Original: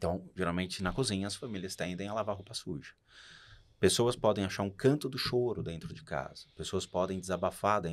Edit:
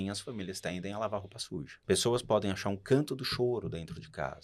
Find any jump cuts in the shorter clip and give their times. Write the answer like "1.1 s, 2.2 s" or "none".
1.7 s